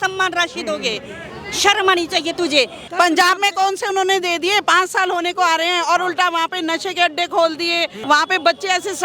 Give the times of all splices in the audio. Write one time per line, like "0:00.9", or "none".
0:02.8
0:08.0